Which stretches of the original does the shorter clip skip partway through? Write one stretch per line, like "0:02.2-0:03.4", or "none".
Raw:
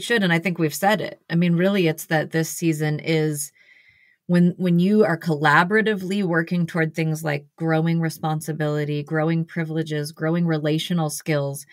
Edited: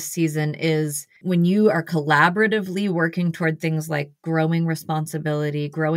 0:03.7-0:04.6